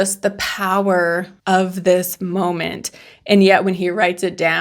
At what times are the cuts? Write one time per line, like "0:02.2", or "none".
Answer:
0:01.3